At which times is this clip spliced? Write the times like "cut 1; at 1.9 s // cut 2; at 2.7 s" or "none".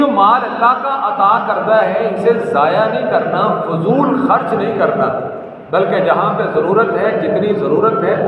none